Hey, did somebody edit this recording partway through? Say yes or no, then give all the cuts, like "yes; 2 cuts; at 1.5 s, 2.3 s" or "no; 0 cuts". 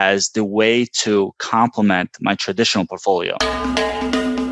yes; 1 cut; at 3.4 s